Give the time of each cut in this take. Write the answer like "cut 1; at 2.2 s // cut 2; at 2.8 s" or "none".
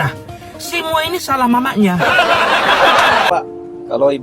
cut 1; at 3.3 s

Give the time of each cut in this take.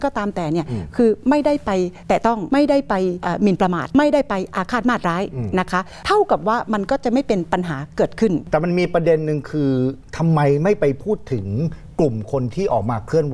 cut 1; at 2.3 s // cut 2; at 3.5 s // cut 3; at 5.9 s // cut 4; at 8.4 s

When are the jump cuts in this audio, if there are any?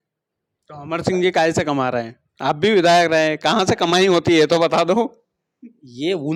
none

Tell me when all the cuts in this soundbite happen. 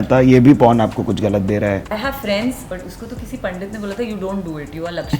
cut 1; at 1.9 s // cut 2; at 2.7 s

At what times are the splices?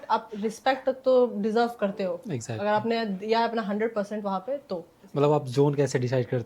cut 1; at 5.0 s

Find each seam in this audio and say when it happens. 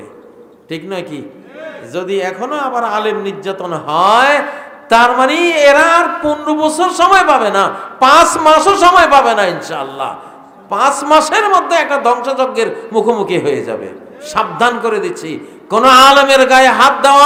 none

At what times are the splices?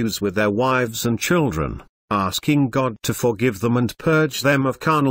none

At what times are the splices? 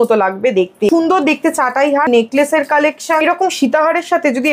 cut 1; at 0.9 s // cut 2; at 2.1 s // cut 3; at 3.2 s

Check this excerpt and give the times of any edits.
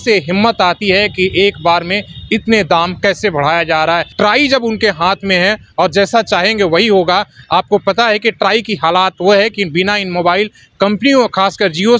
cut 1; at 4.1 s

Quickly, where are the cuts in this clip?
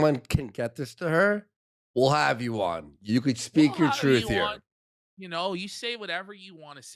none

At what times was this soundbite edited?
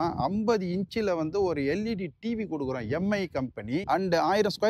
none

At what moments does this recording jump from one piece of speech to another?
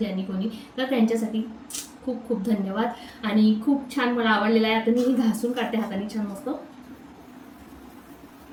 none

